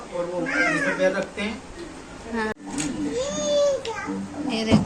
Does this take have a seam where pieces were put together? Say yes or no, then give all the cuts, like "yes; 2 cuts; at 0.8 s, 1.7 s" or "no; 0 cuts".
yes; 1 cut; at 2.5 s